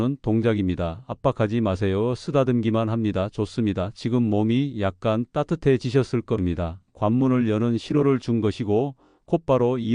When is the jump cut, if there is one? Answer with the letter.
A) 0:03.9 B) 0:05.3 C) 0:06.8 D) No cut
C